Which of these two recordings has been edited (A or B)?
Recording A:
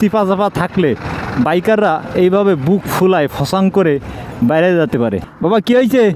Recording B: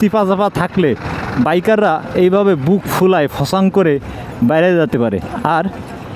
A